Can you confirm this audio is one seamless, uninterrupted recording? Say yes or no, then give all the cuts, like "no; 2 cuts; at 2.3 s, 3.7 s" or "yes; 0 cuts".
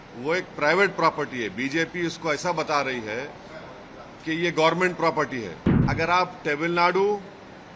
no; 1 cut; at 5.7 s